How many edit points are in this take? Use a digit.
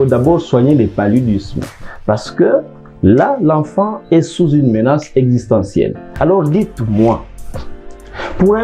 1